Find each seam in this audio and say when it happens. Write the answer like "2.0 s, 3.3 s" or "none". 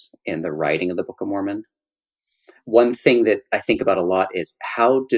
2.6 s

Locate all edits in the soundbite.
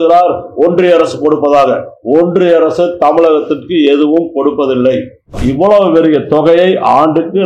5.4 s

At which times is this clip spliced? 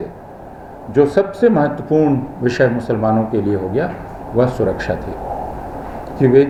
none

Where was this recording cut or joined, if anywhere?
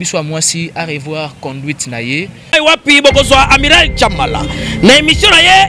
2.4 s

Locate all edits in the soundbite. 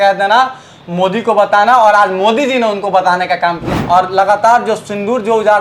3.6 s

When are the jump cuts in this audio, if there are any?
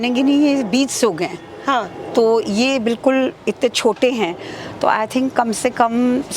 none

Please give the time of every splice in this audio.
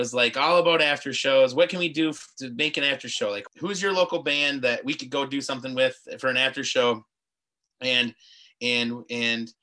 3.4 s

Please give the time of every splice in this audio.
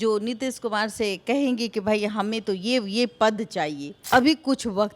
3.9 s

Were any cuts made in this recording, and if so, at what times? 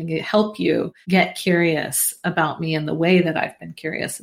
1.0 s

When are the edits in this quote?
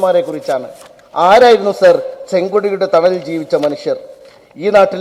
none

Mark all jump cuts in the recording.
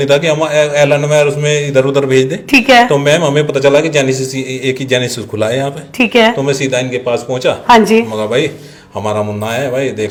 none

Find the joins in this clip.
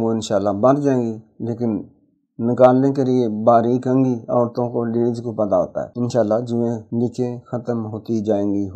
5.8 s, 6.8 s

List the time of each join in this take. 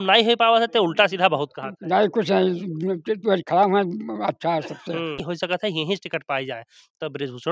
5.2 s

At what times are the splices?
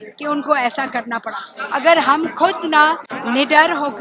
1.5 s, 3.1 s

